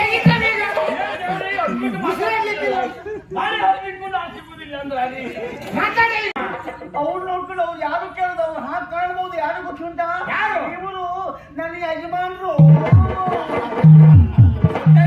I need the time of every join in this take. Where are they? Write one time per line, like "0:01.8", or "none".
0:06.3